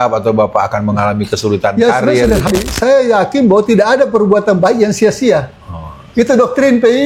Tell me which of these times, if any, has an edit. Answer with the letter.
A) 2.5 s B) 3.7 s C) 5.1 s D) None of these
A